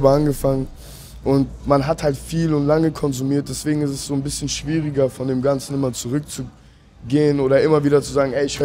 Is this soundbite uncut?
yes; 0 cuts

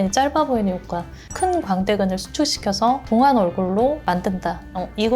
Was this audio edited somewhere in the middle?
yes; 2 cuts; at 1.2 s, 3.0 s

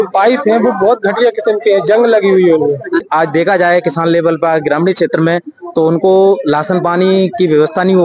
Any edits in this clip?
yes; 1 cut; at 3.1 s

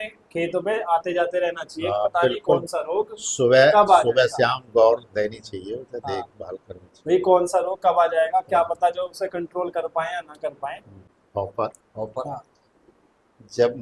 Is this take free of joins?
no; 1 cut; at 11.2 s

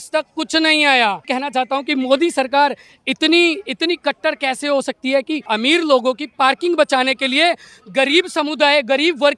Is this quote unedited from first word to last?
no; 2 cuts; at 1.2 s, 5.5 s

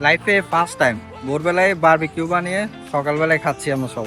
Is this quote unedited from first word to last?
yes; 0 cuts

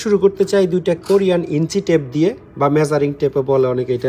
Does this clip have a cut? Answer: no; 0 cuts

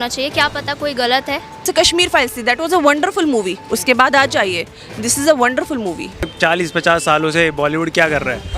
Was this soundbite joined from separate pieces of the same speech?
yes; 2 cuts; at 1.6 s, 6.2 s

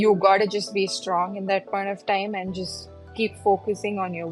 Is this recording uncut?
yes; 0 cuts

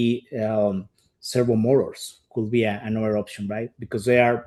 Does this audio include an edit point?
no; 0 cuts

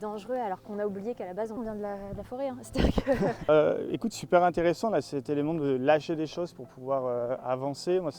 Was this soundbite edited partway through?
yes; 2 cuts; at 1.6 s, 3.4 s

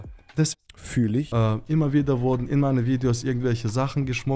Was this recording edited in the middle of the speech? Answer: yes; 1 cut; at 1.3 s

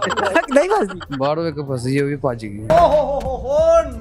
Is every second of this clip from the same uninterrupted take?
yes; 0 cuts

